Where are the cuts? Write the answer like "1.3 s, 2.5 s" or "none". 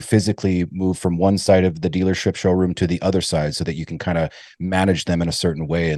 none